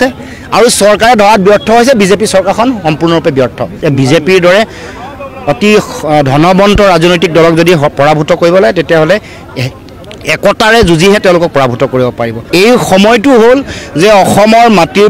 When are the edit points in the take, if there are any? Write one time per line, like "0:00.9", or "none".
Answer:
0:03.7
0:12.3